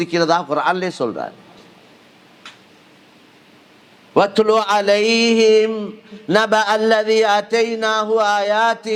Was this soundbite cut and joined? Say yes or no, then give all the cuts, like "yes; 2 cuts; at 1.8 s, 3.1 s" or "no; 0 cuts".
no; 0 cuts